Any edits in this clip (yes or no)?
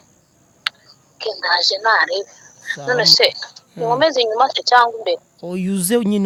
no